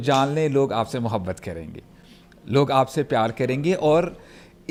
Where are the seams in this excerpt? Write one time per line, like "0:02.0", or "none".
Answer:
none